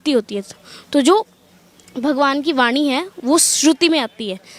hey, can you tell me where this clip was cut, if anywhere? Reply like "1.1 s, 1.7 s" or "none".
none